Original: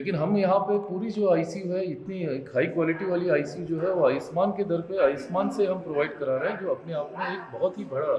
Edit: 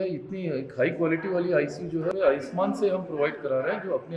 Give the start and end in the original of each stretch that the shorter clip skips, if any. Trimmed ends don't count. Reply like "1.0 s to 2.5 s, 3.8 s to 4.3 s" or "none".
3.9 s to 4.9 s